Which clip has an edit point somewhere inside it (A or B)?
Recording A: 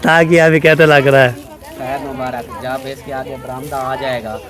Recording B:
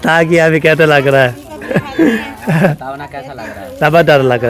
A